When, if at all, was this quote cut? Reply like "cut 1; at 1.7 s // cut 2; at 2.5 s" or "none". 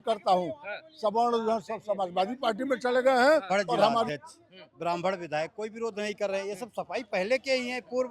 cut 1; at 4.1 s